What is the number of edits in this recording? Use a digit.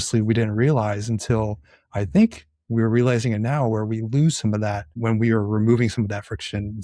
1